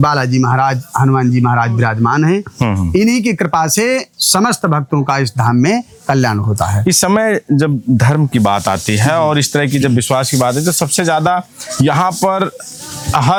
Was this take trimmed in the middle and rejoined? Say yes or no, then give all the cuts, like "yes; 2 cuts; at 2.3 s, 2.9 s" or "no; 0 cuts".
no; 0 cuts